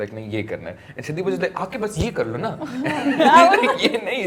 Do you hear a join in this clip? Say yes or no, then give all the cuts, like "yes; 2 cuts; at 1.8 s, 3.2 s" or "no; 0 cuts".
no; 0 cuts